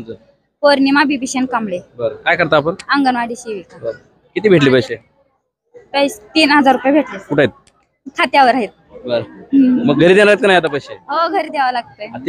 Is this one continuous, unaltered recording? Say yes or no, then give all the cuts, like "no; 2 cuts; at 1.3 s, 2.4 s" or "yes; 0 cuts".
yes; 0 cuts